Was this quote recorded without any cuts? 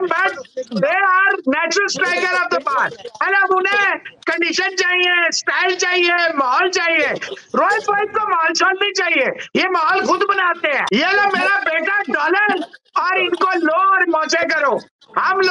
no; 1 cut; at 10.8 s

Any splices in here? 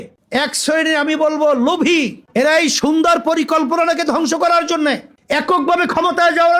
yes; 1 cut; at 5.1 s

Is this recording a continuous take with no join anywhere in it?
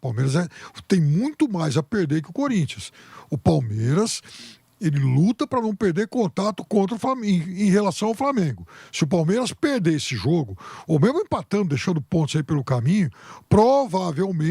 yes; 0 cuts

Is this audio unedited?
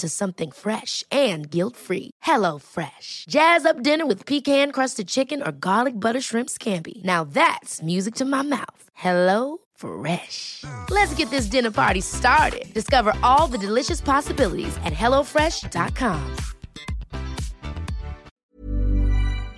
no; 1 cut; at 18.4 s

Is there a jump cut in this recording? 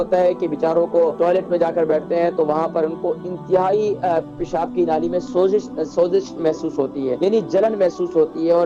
yes; 2 cuts; at 1.1 s, 7.2 s

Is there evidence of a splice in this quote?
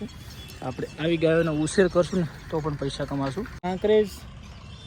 yes; 1 cut; at 3.5 s

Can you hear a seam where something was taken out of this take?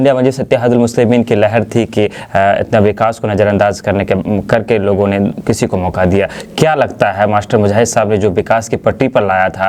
no; 0 cuts

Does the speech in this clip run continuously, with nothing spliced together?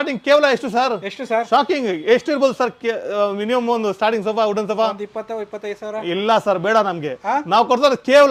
yes; 0 cuts

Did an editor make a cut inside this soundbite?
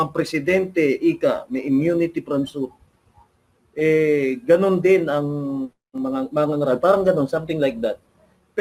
no; 0 cuts

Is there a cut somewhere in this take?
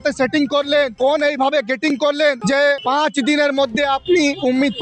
yes; 2 cuts; at 0.9 s, 2.6 s

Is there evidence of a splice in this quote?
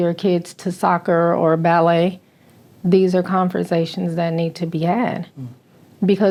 no; 0 cuts

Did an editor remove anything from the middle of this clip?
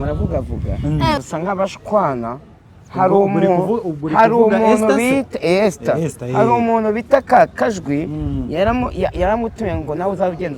yes; 1 cut; at 1.2 s

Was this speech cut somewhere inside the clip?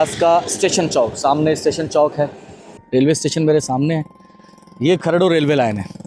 yes; 1 cut; at 2.7 s

